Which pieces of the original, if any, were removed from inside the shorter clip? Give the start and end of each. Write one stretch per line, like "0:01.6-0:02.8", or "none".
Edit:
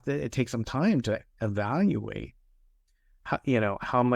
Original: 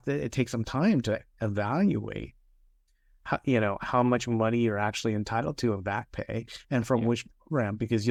none